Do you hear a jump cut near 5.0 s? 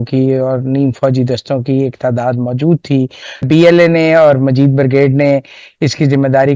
no; 1 cut; at 3.4 s

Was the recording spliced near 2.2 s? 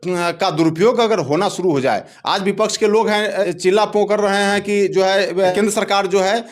no; 2 cuts; at 3.4 s, 5.5 s

